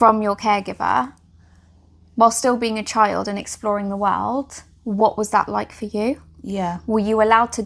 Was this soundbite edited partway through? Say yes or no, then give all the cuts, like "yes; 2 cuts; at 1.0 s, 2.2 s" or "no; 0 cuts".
no; 0 cuts